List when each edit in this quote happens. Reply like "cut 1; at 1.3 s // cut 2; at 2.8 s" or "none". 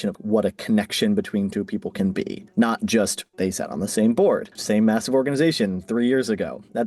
cut 1; at 4.5 s